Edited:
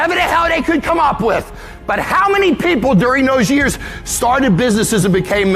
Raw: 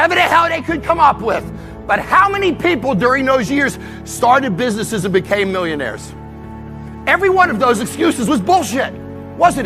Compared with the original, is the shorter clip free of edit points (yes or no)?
yes